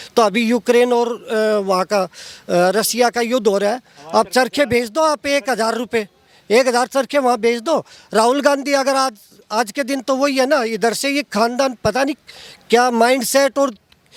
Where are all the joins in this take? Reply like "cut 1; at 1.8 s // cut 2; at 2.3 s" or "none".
none